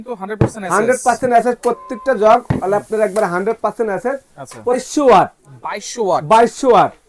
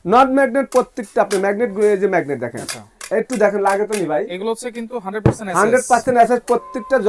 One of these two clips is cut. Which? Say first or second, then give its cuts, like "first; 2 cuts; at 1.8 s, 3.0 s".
first; 1 cut; at 4.8 s